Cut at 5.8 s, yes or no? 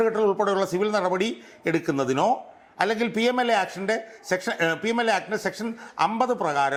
no